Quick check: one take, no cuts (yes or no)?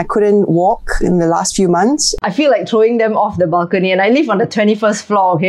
no